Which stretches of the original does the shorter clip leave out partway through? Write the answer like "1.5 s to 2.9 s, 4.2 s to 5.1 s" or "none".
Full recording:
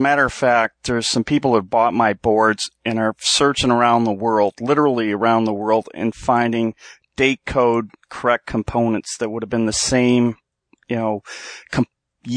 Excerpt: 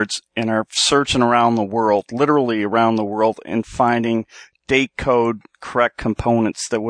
none